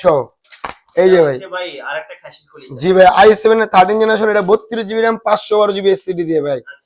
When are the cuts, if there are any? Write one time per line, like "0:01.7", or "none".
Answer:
none